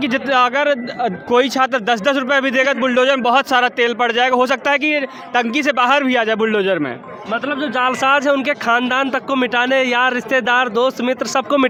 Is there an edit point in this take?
no; 0 cuts

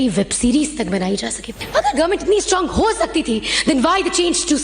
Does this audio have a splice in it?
yes; 1 cut; at 1.6 s

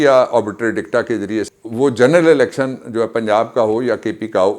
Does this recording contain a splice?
yes; 1 cut; at 1.4 s

